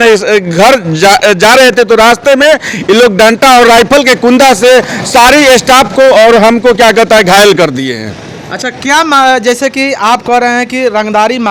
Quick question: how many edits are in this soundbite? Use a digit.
0